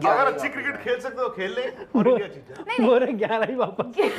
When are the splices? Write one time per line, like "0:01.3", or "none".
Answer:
none